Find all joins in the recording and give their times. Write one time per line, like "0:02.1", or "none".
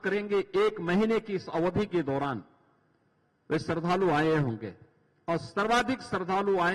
none